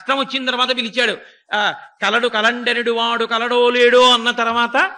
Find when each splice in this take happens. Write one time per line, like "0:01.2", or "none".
none

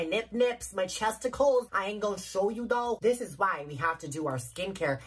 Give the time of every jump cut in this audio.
none

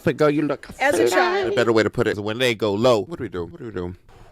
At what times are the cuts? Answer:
0:01.5

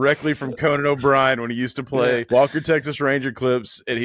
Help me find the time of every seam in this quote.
0:02.2

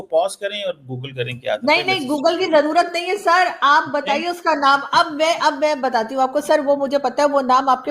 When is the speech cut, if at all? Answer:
none

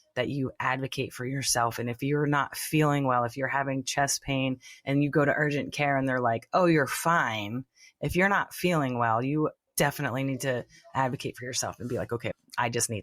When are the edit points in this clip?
0:09.6
0:12.3

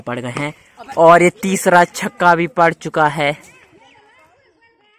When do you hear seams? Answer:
none

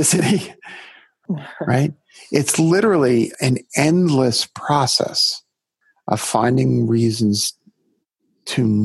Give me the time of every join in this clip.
0:01.1
0:03.3

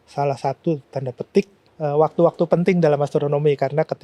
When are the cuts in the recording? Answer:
0:01.6

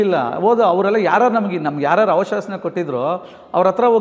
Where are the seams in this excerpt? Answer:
none

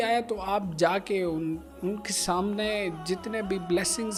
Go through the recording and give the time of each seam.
none

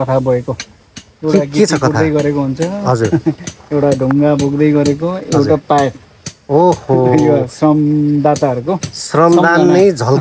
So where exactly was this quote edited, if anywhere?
none

